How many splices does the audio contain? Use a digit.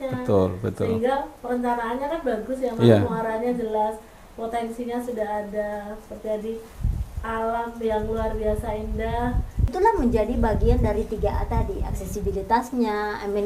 1